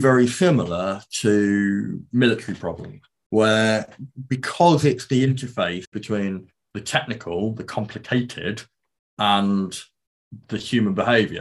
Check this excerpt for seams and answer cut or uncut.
cut